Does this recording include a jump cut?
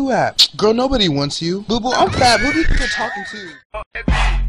no; 0 cuts

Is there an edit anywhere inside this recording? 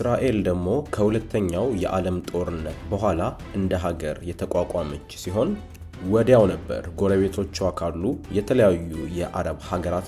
no; 0 cuts

